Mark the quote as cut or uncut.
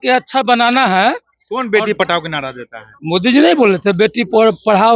uncut